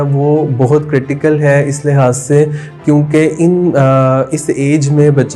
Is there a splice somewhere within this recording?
no; 0 cuts

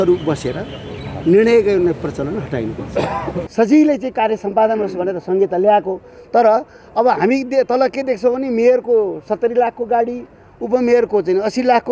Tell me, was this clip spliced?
yes; 1 cut; at 3.5 s

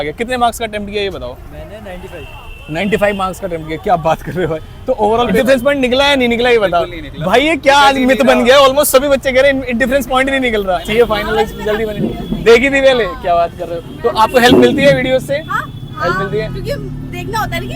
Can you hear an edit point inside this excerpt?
yes; 2 cuts; at 5.3 s, 10.9 s

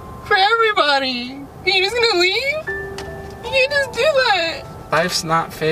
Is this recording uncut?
no; 1 cut; at 4.8 s

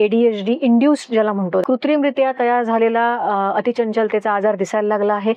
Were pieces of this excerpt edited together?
yes; 1 cut; at 1.6 s

